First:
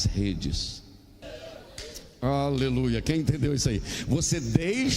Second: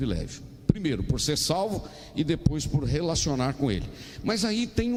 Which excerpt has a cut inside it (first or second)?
first